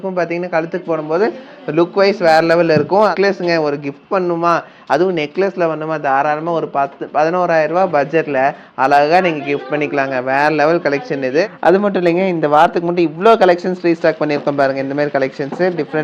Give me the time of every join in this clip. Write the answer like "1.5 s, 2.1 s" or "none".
3.1 s, 11.6 s